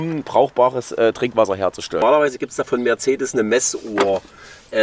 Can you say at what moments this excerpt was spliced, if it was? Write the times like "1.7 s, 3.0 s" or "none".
2.0 s